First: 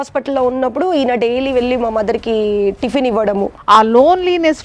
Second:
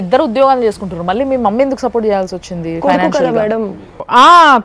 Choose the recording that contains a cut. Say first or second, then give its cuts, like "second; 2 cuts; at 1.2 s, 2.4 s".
first; 1 cut; at 3.6 s